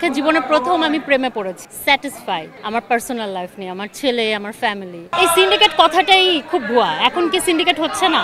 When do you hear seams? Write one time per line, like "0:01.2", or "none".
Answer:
0:01.7
0:05.0